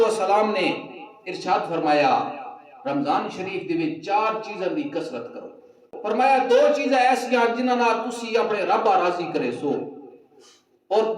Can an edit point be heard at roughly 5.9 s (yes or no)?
yes